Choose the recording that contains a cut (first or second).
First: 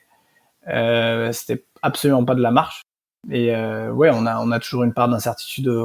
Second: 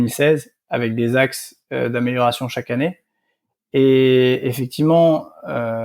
first